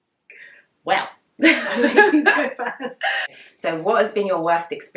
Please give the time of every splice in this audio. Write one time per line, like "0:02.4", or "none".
0:03.2